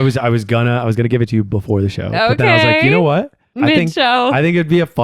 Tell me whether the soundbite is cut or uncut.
cut